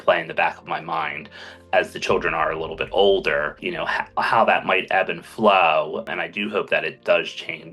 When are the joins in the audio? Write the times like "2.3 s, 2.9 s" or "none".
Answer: 6.1 s